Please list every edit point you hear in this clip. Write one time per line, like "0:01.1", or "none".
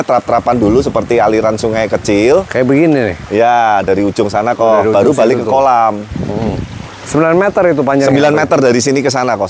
none